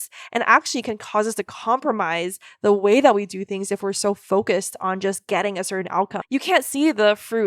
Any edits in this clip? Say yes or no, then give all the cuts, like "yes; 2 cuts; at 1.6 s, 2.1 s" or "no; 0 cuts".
yes; 1 cut; at 6.2 s